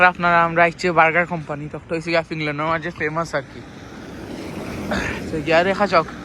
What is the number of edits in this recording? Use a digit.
0